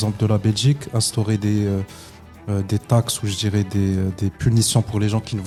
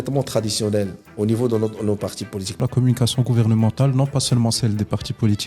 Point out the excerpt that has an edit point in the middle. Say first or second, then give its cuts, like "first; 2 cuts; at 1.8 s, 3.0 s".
second; 2 cuts; at 1.0 s, 2.6 s